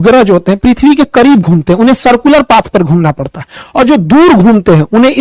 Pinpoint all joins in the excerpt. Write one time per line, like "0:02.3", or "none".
none